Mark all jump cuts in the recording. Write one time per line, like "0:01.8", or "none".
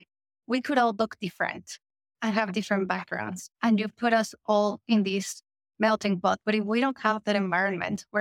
0:06.4